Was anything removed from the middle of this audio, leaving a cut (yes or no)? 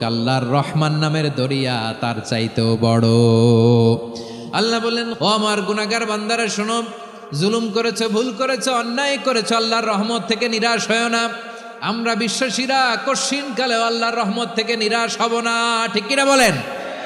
yes